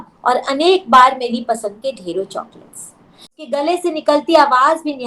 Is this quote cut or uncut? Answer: cut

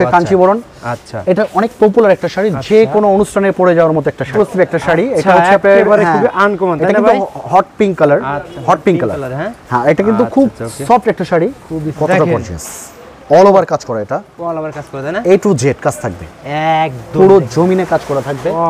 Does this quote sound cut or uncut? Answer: cut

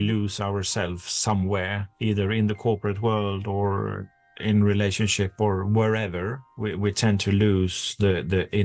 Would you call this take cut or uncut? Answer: cut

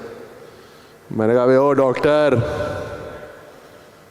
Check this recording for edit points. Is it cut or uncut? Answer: uncut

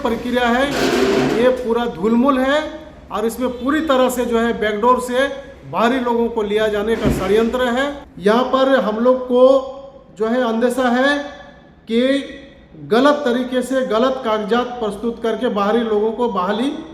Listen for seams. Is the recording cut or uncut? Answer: cut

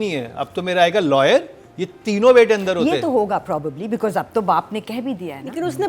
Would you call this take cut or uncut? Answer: uncut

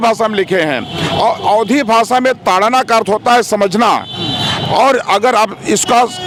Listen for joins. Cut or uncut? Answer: uncut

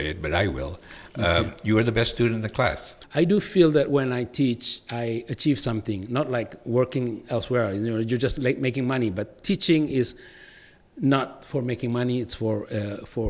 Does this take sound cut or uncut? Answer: cut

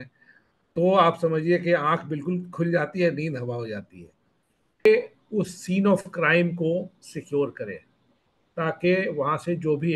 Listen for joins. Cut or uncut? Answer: cut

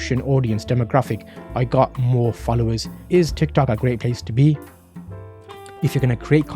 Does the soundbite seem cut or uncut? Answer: cut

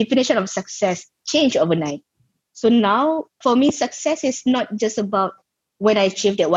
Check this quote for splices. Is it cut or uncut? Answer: cut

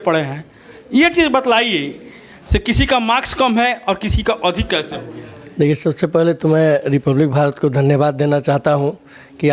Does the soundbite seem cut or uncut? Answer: uncut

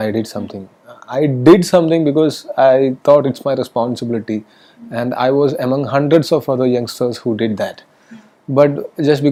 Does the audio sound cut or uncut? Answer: uncut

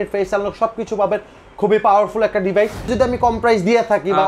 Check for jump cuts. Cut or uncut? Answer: cut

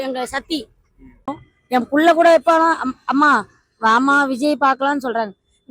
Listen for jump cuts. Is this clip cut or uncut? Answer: cut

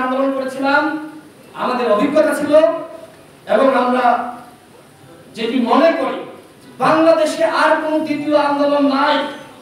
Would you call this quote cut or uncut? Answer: uncut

